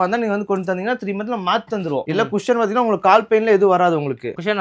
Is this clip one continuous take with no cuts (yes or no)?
no